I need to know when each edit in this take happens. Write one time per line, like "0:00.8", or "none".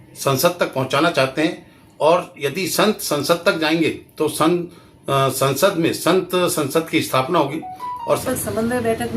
0:08.2